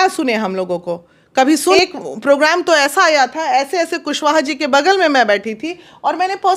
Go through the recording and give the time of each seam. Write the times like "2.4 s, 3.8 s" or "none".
1.8 s